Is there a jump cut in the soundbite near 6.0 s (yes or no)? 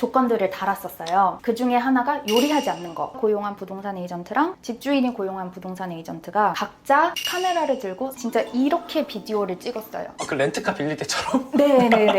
no